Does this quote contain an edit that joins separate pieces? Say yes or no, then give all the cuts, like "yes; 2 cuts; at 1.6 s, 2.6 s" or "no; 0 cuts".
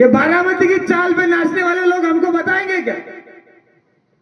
no; 0 cuts